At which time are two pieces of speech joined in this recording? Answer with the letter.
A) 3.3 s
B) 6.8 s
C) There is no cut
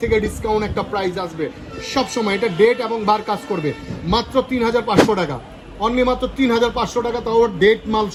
C